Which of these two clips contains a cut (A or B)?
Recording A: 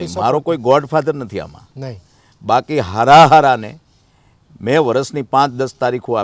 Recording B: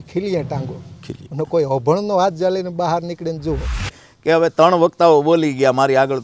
B